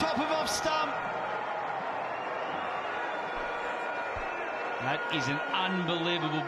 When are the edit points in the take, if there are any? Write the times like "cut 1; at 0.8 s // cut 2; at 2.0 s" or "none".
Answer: none